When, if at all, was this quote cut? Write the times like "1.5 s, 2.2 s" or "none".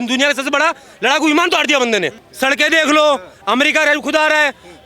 2.2 s